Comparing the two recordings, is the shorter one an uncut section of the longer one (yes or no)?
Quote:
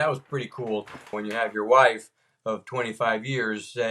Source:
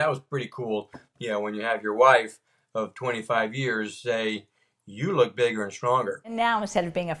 no